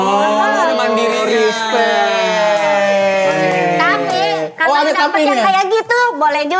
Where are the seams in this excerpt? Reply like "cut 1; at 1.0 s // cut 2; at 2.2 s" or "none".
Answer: none